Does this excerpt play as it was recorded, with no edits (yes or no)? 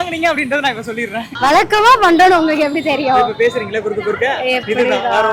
no